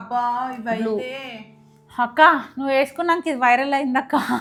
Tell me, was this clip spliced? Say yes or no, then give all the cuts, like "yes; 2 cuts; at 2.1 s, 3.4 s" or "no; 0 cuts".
no; 0 cuts